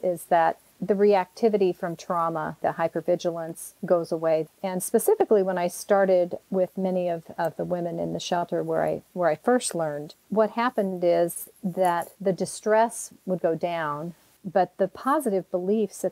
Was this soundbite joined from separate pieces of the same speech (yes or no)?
no